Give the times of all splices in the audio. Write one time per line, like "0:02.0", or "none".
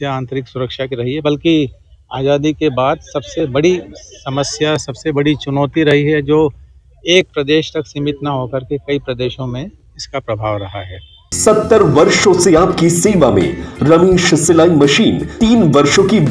0:11.3
0:15.3